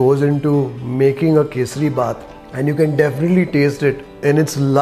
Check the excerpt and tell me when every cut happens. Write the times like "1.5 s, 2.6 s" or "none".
none